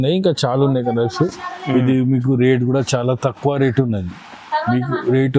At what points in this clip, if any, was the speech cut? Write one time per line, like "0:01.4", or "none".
none